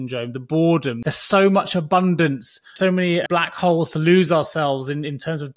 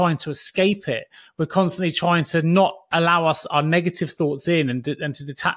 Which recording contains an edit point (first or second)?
first